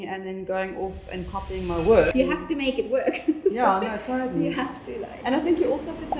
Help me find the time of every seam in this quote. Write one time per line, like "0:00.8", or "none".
0:02.1